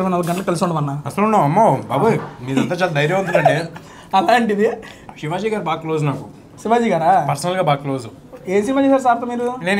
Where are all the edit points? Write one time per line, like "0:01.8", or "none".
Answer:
none

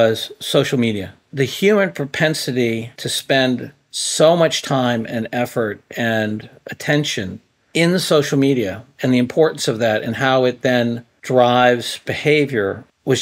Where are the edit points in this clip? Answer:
0:01.1

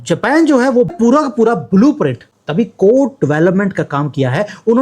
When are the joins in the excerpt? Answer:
0:00.9

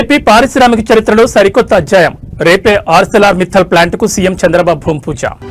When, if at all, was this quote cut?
none

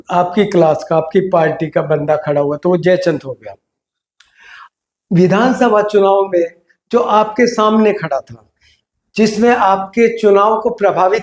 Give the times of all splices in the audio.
none

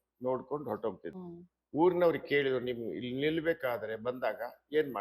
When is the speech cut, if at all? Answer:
0:01.1

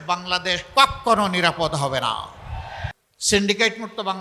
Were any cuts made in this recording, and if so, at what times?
0:02.9

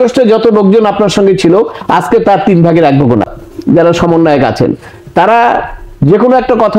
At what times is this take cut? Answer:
0:03.3

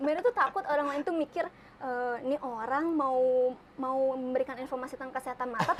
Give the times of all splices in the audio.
none

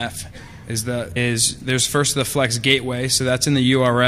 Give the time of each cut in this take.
none

